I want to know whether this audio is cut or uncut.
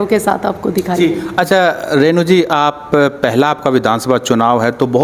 uncut